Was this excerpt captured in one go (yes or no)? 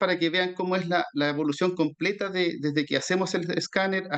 yes